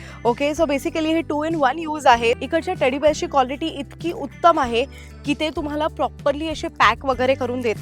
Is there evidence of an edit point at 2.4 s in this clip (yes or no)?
yes